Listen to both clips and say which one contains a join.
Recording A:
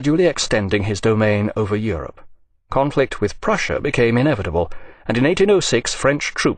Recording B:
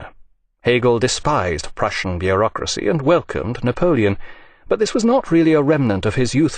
A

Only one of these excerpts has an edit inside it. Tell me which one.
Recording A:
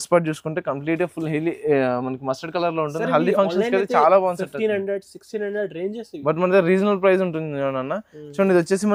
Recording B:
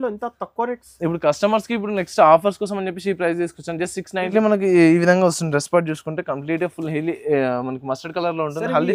B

